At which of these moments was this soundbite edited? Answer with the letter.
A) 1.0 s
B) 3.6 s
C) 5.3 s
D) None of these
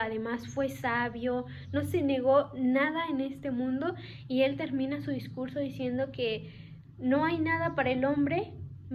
D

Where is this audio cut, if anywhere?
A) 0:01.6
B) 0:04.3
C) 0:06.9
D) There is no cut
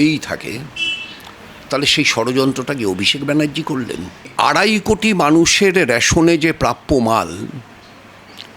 B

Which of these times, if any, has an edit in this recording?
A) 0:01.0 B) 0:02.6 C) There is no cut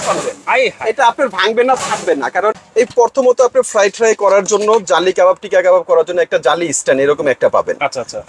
B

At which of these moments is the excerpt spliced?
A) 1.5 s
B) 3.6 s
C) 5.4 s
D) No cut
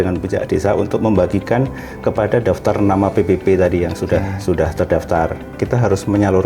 C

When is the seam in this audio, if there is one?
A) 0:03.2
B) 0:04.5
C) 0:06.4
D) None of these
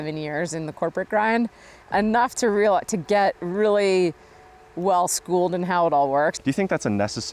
C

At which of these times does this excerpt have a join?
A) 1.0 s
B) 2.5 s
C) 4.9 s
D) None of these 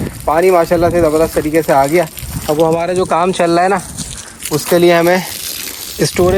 D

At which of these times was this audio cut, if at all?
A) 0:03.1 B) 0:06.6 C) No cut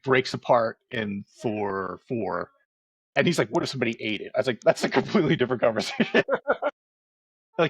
A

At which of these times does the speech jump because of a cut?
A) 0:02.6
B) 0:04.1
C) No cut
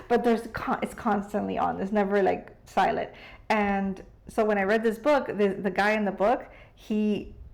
C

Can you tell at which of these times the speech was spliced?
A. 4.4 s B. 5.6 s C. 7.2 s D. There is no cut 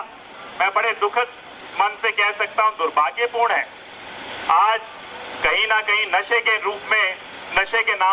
D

